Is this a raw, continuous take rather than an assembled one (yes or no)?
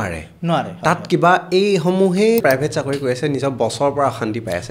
no